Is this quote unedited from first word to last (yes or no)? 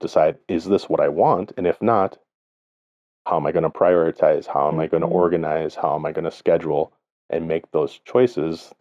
yes